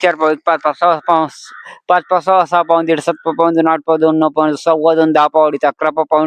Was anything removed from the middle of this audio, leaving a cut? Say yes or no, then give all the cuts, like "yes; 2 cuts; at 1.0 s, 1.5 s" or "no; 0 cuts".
no; 0 cuts